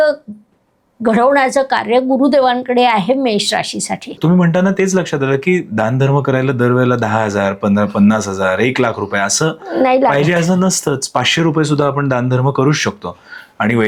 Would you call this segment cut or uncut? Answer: cut